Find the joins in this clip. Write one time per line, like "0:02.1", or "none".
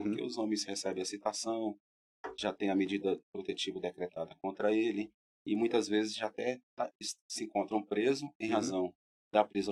none